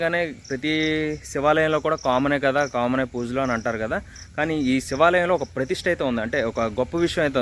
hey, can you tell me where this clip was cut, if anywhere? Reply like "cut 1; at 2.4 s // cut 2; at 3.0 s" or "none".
none